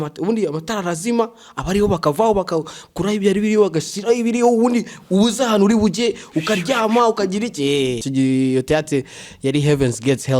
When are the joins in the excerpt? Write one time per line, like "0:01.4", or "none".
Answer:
0:08.0